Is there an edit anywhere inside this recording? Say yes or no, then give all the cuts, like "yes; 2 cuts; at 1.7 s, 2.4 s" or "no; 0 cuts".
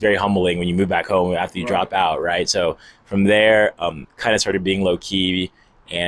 no; 0 cuts